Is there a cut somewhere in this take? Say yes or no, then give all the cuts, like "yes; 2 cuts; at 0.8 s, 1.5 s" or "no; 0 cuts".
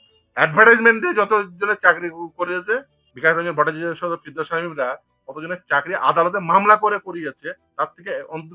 yes; 1 cut; at 3.0 s